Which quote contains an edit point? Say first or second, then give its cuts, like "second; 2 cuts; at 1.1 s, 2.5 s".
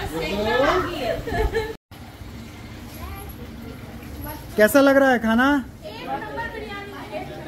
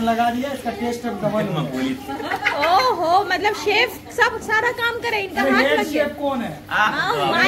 first; 1 cut; at 1.9 s